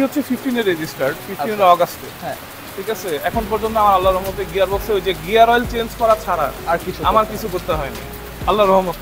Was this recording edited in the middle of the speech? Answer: no; 0 cuts

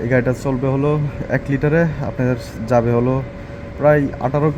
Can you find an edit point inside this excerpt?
no; 0 cuts

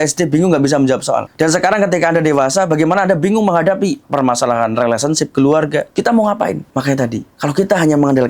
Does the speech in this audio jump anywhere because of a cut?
yes; 2 cuts; at 4.0 s, 5.9 s

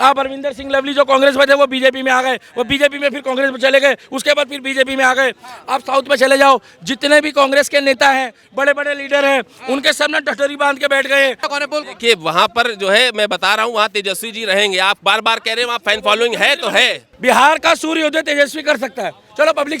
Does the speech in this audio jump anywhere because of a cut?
yes; 2 cuts; at 11.5 s, 17.0 s

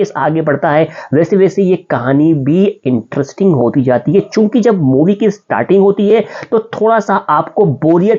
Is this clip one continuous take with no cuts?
yes; 0 cuts

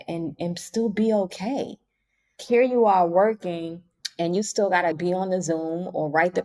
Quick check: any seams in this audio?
yes; 1 cut; at 2.4 s

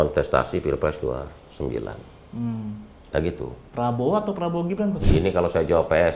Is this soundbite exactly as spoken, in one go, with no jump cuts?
no; 1 cut; at 5.1 s

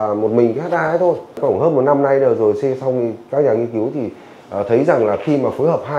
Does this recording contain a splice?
no; 0 cuts

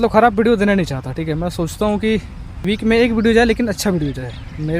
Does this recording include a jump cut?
yes; 1 cut; at 2.6 s

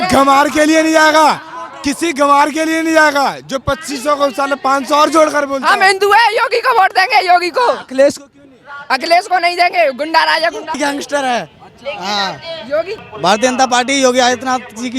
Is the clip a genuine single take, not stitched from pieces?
no; 1 cut; at 13.0 s

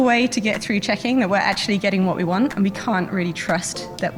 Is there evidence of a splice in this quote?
no; 0 cuts

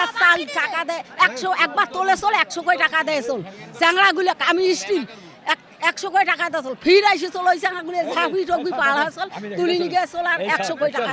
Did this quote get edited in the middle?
no; 0 cuts

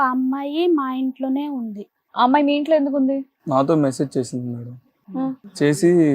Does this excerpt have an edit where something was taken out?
yes; 1 cut; at 3.4 s

